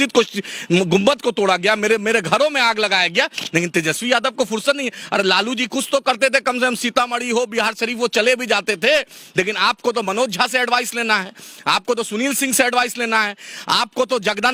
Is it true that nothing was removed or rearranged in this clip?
yes; 0 cuts

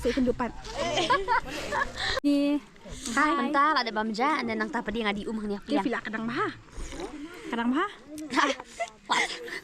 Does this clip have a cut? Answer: yes; 1 cut; at 2.3 s

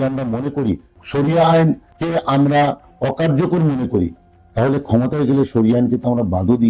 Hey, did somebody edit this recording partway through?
yes; 2 cuts; at 0.9 s, 1.9 s

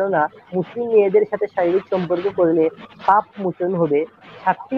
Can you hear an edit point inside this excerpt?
no; 0 cuts

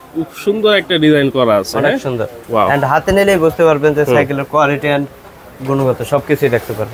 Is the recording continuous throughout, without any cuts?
yes; 0 cuts

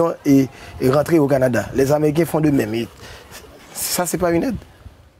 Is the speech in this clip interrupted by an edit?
no; 0 cuts

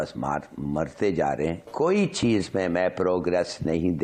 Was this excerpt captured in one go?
yes; 0 cuts

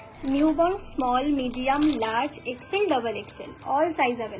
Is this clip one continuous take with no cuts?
yes; 0 cuts

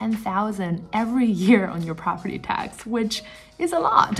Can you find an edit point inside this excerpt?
no; 0 cuts

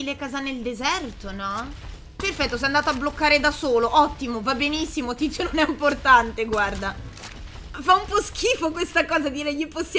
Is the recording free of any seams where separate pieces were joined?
no; 2 cuts; at 1.9 s, 7.7 s

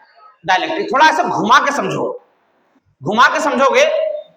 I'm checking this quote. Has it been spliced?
no; 0 cuts

